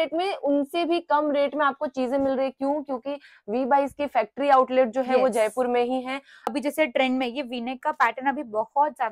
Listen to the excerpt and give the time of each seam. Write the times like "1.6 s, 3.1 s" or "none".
6.5 s

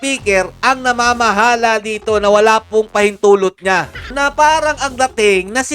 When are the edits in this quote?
4.1 s

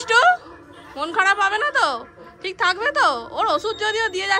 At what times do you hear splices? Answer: none

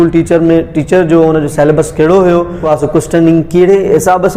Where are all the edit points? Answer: 2.6 s

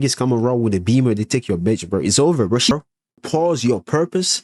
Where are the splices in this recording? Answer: 3.0 s

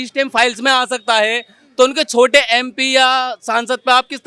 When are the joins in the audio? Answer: none

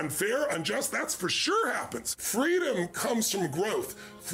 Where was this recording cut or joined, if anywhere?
2.2 s

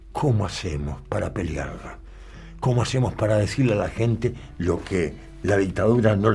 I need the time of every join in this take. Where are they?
none

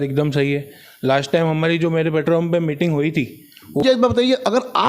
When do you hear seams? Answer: 3.8 s

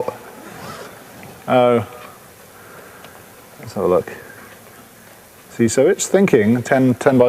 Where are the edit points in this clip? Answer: 5.9 s

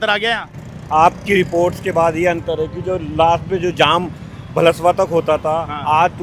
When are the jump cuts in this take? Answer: none

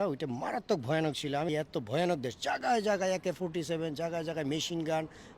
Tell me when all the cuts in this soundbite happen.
1.5 s

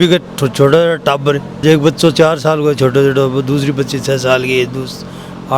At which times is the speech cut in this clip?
none

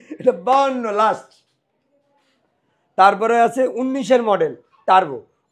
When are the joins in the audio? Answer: none

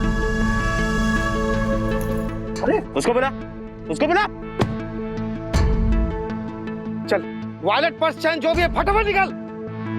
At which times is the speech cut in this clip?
none

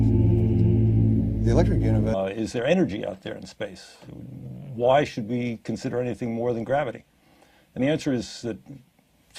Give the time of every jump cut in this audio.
none

